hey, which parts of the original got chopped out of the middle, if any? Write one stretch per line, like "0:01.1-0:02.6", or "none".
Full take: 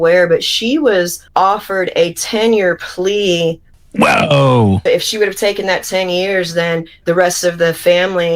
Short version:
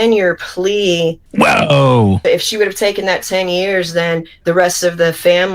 0:03.6-0:03.8